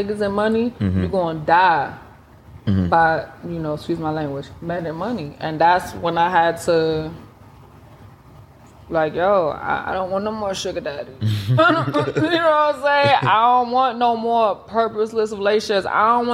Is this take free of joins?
yes; 0 cuts

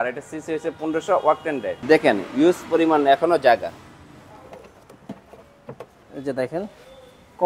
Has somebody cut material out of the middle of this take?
yes; 1 cut; at 1.8 s

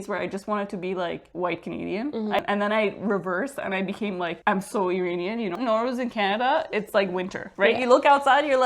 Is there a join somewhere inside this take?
yes; 2 cuts; at 2.4 s, 5.5 s

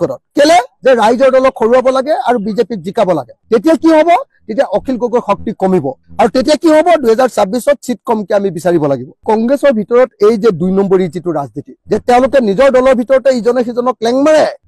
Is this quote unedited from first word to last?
yes; 0 cuts

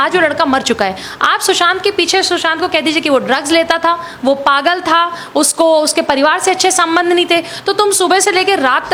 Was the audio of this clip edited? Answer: no; 0 cuts

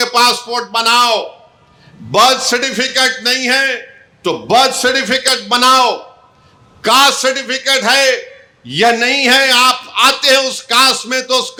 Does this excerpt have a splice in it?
no; 0 cuts

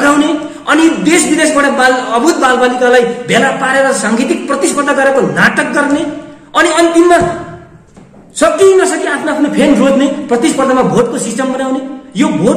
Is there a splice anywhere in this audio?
no; 0 cuts

